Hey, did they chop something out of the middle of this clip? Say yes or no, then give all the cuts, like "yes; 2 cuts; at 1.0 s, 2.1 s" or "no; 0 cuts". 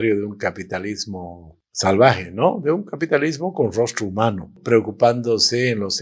yes; 1 cut; at 4.6 s